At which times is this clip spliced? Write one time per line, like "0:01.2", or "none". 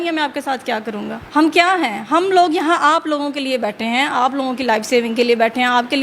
0:01.2